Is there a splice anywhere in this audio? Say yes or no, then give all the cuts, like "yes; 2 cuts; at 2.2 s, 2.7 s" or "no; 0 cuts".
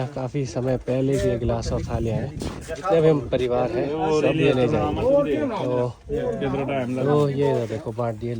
no; 0 cuts